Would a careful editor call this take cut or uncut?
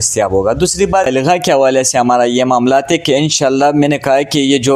cut